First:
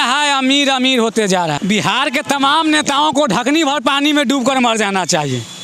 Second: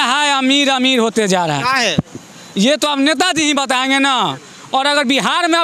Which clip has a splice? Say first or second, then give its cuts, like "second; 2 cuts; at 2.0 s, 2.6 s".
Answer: first; 1 cut; at 1.6 s